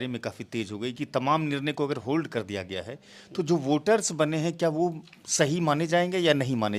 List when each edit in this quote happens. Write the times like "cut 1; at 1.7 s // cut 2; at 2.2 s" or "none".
none